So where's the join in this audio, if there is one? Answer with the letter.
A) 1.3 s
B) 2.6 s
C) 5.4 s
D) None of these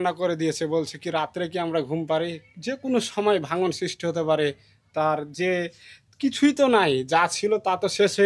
D